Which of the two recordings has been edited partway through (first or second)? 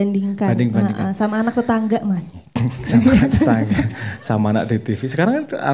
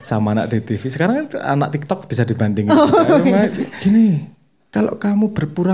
second